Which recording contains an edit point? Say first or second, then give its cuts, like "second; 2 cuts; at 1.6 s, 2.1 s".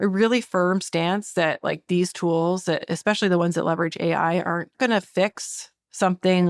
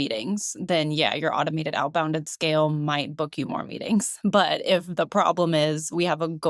first; 1 cut; at 4.7 s